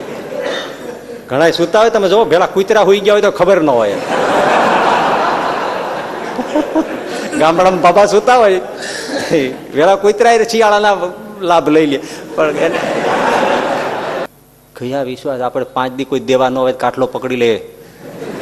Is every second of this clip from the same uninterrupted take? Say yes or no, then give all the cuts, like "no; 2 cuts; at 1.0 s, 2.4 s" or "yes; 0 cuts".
no; 1 cut; at 14.3 s